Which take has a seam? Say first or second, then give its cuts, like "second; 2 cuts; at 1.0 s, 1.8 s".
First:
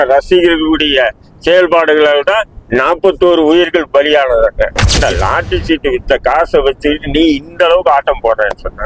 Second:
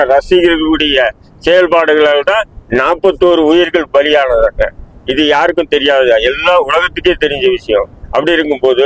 first; 1 cut; at 4.8 s